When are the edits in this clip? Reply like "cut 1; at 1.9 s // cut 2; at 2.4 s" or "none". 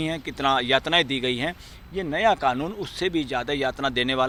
none